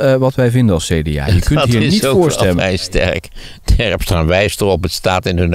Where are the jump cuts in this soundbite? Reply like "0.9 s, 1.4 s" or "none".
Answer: 2.6 s